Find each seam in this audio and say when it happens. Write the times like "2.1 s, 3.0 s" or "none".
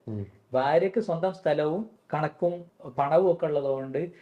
2.0 s, 2.7 s